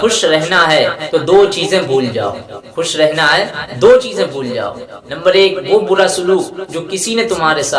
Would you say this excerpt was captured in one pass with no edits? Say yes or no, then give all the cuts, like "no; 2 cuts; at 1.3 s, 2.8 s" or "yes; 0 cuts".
yes; 0 cuts